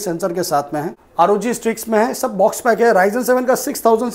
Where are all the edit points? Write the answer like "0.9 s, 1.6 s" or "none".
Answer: 1.0 s